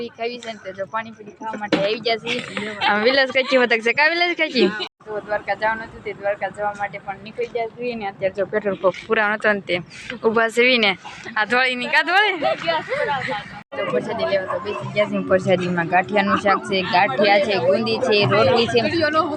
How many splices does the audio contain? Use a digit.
2